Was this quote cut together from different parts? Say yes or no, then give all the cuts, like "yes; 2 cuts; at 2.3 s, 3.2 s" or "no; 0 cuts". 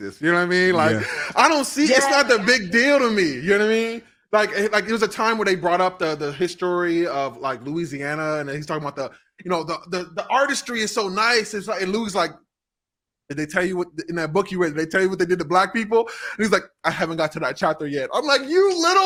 no; 0 cuts